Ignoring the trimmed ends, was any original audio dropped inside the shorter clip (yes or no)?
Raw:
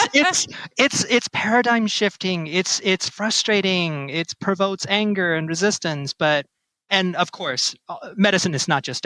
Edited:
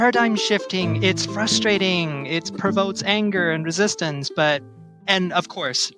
yes